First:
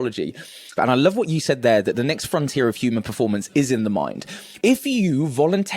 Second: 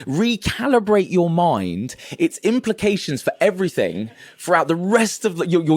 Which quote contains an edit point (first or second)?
first